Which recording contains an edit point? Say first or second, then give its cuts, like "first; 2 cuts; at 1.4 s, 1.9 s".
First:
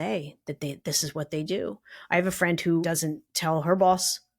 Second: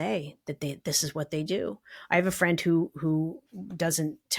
first; 1 cut; at 2.8 s